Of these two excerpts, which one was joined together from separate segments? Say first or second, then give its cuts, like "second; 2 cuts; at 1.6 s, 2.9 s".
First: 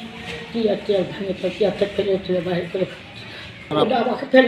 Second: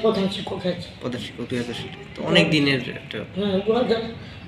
first; 1 cut; at 3.6 s